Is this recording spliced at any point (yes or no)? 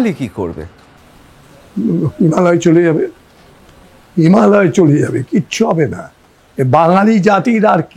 no